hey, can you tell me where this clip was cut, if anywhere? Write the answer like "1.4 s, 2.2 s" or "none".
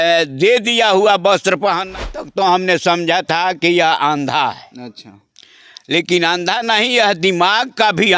2.0 s

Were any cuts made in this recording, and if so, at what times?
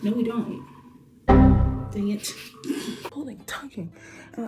3.1 s

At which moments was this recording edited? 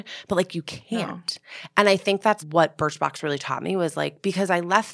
2.4 s

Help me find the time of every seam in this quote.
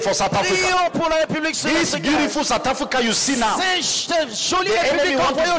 1.5 s

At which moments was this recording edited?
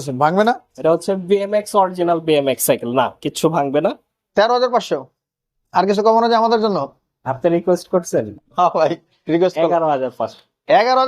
4.1 s

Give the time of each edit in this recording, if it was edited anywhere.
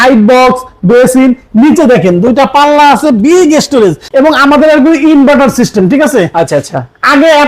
4.0 s

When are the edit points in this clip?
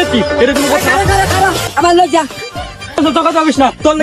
none

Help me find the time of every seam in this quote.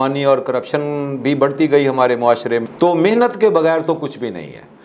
2.7 s

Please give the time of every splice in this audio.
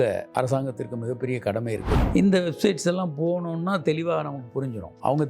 2.0 s

